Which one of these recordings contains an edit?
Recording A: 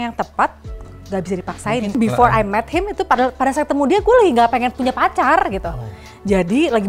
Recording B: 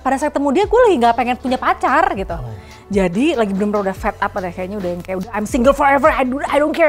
A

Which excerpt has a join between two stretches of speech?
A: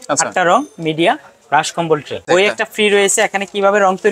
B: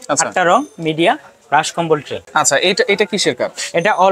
A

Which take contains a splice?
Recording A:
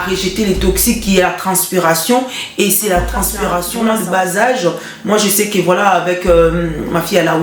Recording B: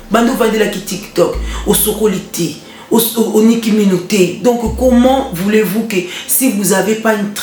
A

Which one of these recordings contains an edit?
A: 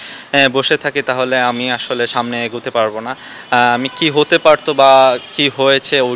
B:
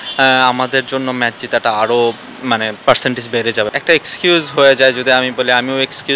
B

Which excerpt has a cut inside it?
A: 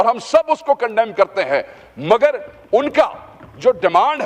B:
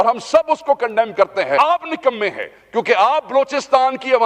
B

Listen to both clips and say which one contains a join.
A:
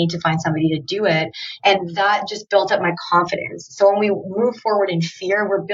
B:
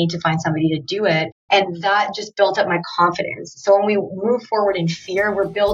B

